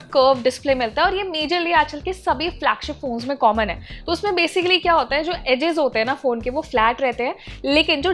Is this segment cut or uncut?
uncut